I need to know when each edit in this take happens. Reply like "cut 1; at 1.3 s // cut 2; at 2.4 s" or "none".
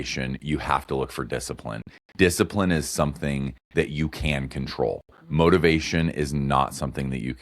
none